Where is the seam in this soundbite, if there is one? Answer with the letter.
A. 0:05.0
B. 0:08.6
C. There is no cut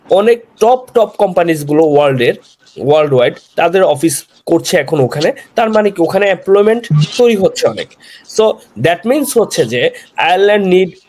C